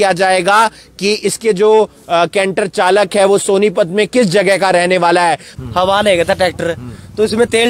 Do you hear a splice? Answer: yes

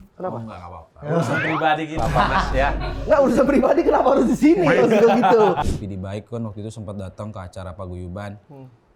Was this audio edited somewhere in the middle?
yes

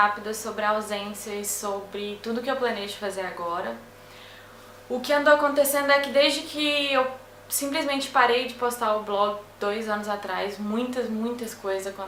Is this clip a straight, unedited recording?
yes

